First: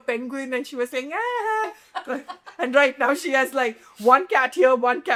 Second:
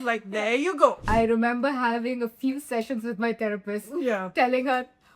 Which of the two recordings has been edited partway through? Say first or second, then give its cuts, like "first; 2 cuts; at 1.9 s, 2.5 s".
second; 1 cut; at 1.1 s